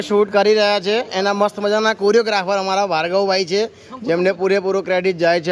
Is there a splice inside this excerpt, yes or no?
no